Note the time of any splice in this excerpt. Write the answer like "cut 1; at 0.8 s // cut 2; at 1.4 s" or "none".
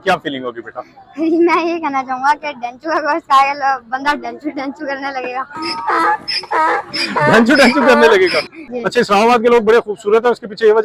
cut 1; at 8.7 s